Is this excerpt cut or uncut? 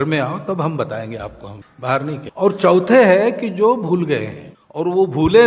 cut